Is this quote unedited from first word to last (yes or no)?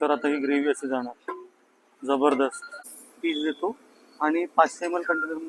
no